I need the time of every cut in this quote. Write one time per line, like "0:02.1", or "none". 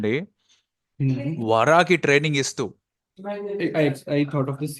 none